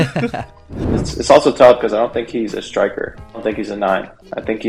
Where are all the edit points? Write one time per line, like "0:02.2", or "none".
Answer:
0:01.0